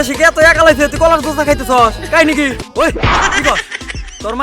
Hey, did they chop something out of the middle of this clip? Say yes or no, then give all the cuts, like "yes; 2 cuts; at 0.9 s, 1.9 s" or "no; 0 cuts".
yes; 1 cut; at 2.6 s